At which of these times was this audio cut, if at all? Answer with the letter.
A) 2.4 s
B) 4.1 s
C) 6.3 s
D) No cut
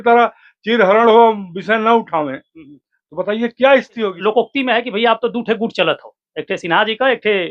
B